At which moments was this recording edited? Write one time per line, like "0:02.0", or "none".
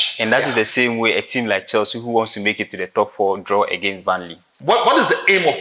0:04.5

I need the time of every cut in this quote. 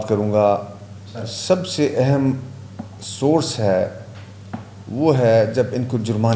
none

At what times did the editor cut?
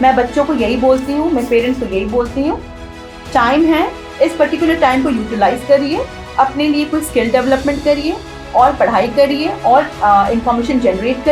none

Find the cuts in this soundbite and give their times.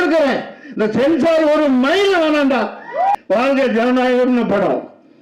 0:03.1

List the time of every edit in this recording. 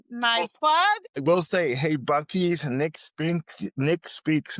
0:01.2

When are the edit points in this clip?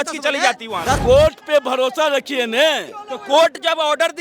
0:01.0

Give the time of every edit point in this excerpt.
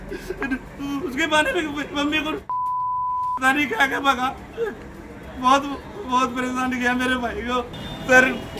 0:07.7

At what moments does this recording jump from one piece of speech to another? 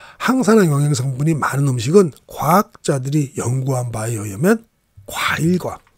none

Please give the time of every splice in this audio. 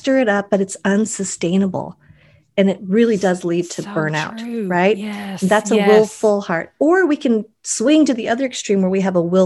none

